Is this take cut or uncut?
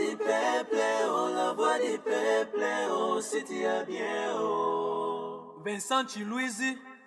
uncut